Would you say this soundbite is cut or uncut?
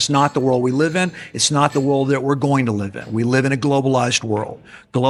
uncut